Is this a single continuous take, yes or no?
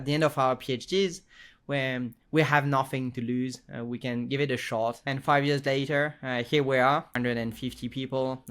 no